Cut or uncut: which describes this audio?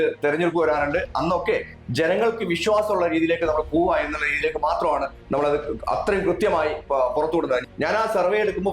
cut